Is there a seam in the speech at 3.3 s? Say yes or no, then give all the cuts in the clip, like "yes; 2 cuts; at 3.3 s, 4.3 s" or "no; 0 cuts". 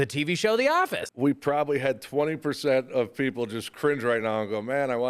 no; 1 cut; at 1.0 s